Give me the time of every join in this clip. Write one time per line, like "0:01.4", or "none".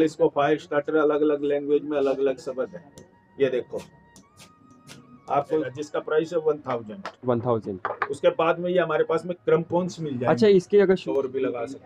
0:05.6
0:11.0

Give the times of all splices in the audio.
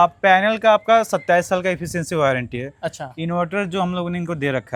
none

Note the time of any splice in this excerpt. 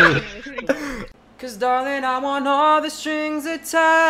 0:01.0

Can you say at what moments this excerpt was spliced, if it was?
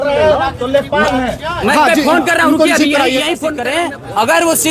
0:03.6

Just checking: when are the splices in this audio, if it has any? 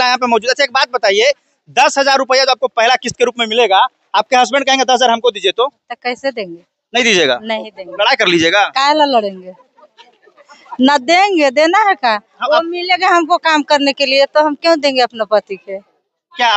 none

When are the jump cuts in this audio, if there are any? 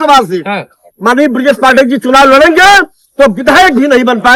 none

